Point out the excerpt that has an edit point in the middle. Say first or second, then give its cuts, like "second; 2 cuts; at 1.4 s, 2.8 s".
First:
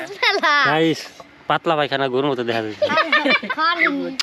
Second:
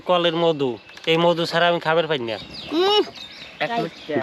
second; 1 cut; at 2.5 s